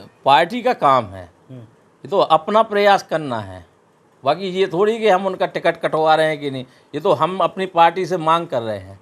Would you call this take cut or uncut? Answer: uncut